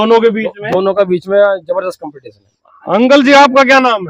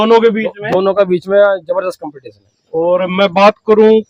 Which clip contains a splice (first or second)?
first